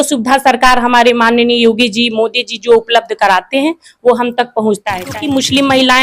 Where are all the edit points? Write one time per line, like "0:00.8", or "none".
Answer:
0:04.9

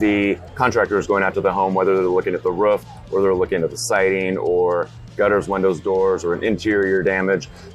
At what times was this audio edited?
none

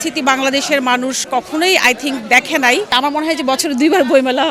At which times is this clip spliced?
0:02.9

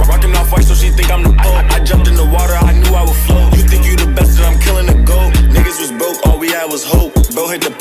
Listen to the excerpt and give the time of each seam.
none

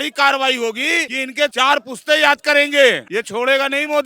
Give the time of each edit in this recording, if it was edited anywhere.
0:01.4
0:03.0

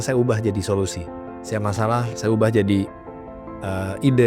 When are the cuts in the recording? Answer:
none

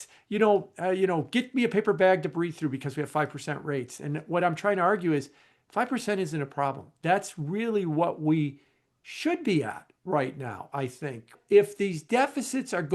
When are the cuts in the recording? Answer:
0:11.4

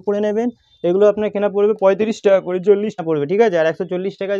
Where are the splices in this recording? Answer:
0:03.0

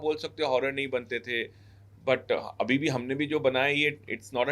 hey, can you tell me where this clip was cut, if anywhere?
none

